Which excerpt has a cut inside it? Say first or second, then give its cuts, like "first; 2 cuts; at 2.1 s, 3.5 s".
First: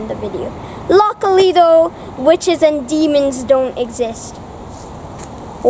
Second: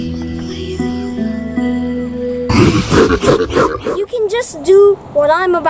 second; 2 cuts; at 2.5 s, 3.8 s